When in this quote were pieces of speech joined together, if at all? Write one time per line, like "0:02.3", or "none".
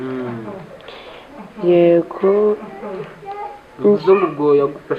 none